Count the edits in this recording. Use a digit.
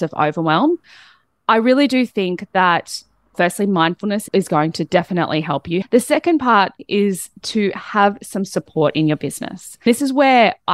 3